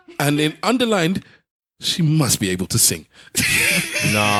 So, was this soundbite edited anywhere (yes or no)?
no